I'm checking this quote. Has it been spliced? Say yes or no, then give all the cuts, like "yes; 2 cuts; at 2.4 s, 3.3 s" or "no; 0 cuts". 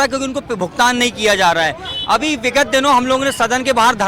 no; 0 cuts